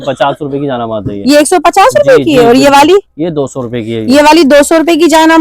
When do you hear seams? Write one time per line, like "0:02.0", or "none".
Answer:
none